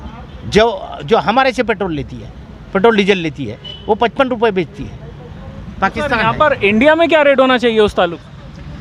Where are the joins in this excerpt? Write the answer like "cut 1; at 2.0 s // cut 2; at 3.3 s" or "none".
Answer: none